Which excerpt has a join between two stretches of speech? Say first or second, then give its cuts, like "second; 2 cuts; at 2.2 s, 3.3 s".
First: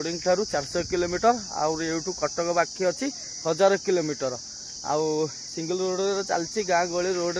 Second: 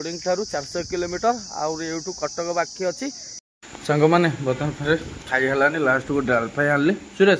second; 1 cut; at 3.3 s